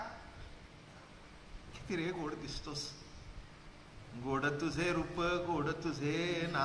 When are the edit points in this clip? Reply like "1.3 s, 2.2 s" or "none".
none